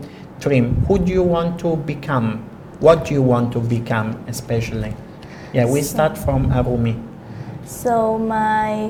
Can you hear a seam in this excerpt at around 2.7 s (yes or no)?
no